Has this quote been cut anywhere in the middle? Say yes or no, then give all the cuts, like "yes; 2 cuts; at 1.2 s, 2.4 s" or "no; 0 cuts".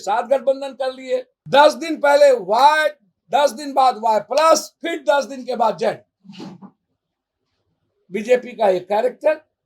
yes; 1 cut; at 1.4 s